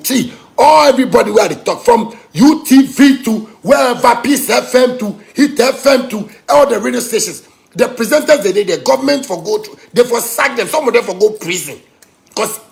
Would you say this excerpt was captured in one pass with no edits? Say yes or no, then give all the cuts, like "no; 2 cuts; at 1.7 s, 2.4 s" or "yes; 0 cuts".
yes; 0 cuts